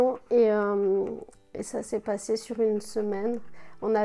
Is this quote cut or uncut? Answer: cut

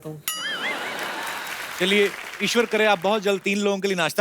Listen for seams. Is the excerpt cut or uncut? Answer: cut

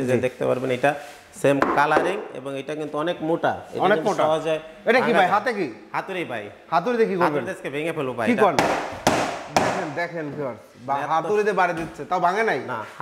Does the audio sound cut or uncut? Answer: uncut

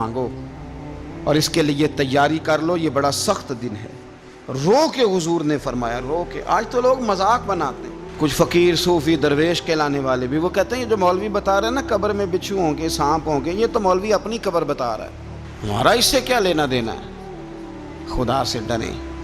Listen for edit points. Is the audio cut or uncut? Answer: uncut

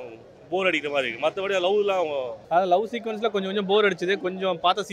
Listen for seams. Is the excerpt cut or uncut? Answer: cut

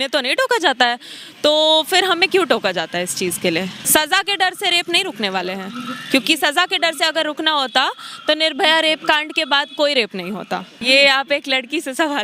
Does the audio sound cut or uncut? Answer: cut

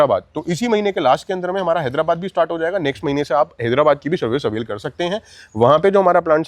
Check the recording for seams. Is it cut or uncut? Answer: uncut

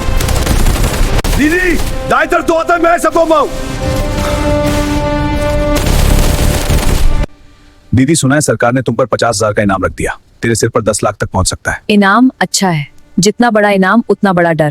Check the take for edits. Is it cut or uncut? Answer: cut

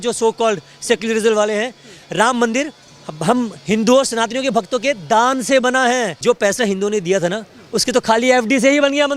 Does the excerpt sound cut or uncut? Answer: cut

